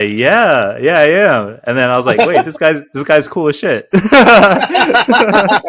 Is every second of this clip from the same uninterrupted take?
yes; 0 cuts

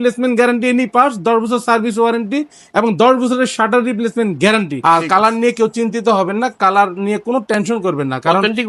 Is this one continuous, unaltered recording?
no; 1 cut; at 4.7 s

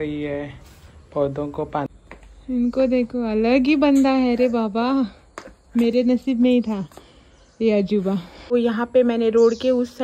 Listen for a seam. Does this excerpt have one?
yes; 2 cuts; at 1.9 s, 8.5 s

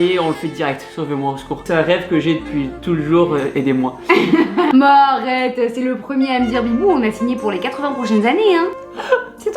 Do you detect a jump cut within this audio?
yes; 2 cuts; at 1.6 s, 4.7 s

